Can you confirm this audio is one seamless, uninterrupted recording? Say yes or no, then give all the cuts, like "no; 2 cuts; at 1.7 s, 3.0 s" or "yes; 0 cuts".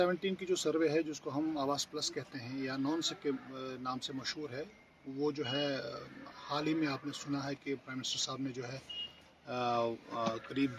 yes; 0 cuts